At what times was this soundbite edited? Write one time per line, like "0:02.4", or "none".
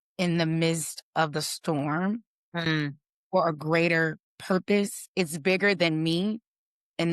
0:04.3